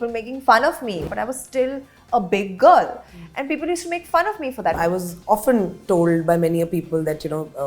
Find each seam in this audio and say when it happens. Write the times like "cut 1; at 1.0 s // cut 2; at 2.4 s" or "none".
cut 1; at 1.0 s // cut 2; at 4.8 s